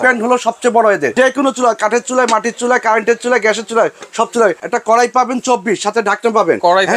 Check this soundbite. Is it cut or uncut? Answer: cut